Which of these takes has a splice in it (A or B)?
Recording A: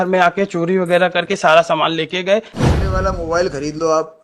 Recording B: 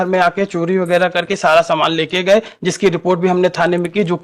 A